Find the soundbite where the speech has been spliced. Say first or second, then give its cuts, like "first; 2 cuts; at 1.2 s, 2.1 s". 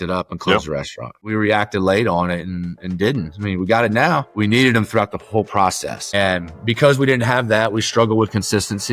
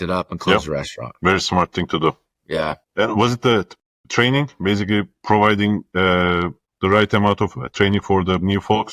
first; 2 cuts; at 1.2 s, 4.3 s